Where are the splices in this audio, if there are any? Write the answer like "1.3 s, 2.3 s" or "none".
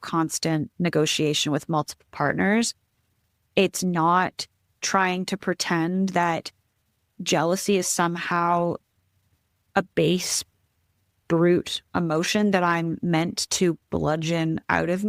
none